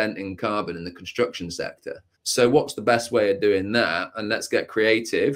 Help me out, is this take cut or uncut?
cut